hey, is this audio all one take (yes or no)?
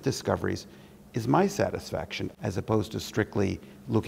no